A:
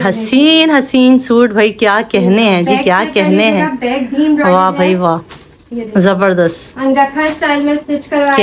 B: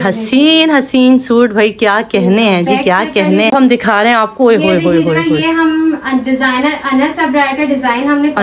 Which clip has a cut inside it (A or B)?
B